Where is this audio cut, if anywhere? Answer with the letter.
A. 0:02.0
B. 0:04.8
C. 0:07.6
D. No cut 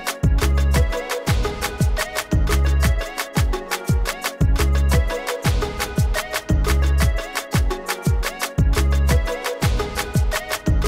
D